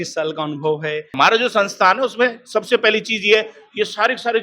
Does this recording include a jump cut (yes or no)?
yes